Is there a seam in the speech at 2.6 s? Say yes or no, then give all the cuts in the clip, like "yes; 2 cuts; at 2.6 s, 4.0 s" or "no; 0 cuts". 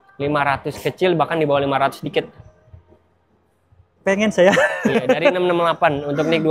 no; 0 cuts